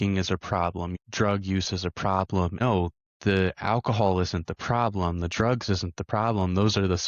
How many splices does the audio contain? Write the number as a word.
two